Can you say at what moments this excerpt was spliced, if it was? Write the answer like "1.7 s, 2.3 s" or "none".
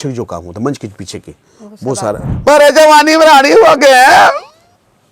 2.3 s